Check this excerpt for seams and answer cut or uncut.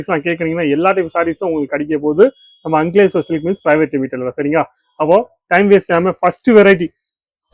uncut